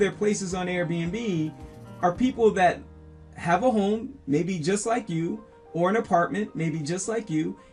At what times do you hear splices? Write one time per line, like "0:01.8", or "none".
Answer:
none

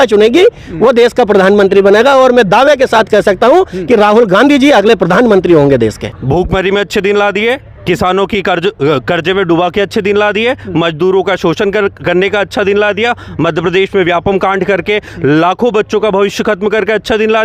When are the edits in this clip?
0:06.1

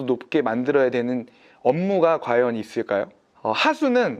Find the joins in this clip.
0:03.3

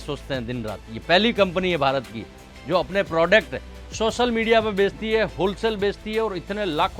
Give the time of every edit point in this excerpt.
none

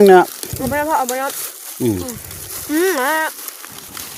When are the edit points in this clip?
none

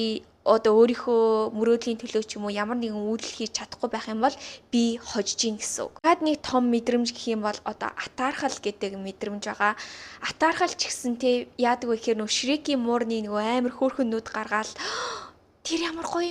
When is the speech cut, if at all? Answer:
none

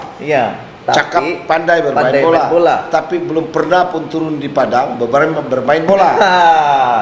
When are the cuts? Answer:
none

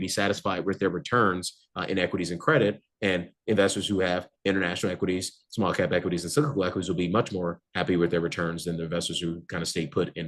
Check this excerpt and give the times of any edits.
none

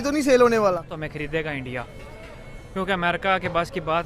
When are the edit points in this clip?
0:01.0

